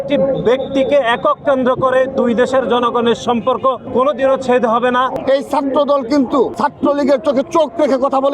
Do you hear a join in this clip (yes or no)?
yes